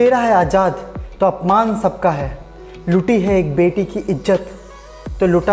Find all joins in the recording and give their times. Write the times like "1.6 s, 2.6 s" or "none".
none